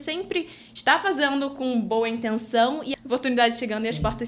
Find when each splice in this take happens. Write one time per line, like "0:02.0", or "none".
0:02.9